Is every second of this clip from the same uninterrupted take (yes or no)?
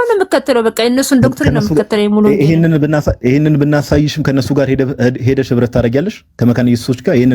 yes